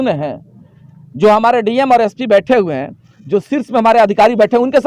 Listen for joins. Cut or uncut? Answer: uncut